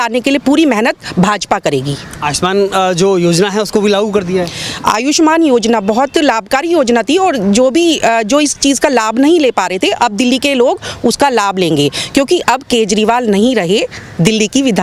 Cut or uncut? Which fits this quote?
uncut